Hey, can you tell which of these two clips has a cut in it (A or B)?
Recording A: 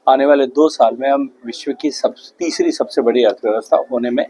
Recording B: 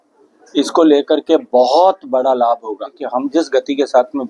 B